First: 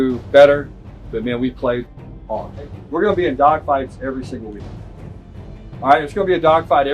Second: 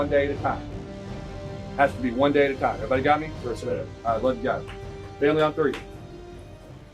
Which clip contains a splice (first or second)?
first